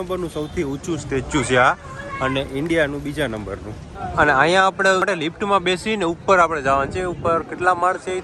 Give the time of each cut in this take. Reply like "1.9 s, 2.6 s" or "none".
none